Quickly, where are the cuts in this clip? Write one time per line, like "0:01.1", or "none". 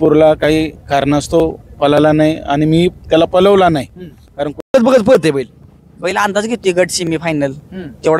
0:04.7

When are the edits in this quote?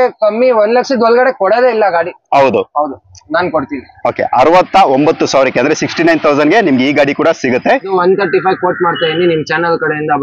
0:07.9

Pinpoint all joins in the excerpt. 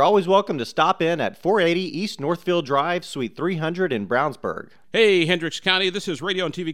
0:04.7

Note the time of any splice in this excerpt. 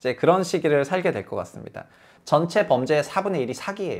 0:02.1

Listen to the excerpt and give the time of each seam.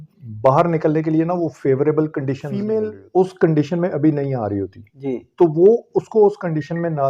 0:02.5

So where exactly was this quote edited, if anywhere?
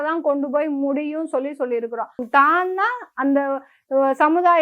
0:02.2

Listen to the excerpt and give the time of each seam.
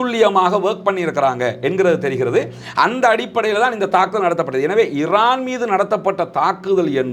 none

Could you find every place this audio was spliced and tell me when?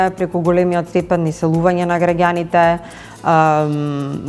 none

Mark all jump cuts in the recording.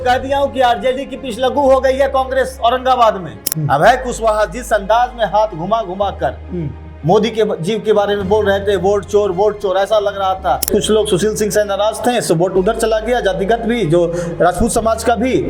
0:03.5
0:10.7

